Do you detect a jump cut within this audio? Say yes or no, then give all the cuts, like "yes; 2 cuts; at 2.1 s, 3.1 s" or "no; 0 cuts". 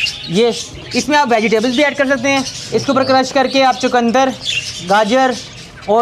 no; 0 cuts